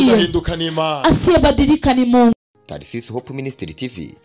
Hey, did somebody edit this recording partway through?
yes; 1 cut; at 2.3 s

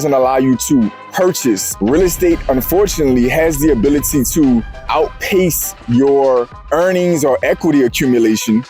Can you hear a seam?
yes; 1 cut; at 1.7 s

